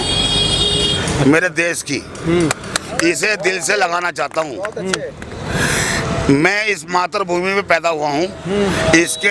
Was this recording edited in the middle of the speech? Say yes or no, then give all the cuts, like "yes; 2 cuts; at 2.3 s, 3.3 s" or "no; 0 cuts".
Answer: no; 0 cuts